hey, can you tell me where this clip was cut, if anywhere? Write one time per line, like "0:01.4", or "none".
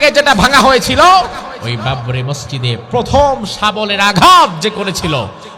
0:01.6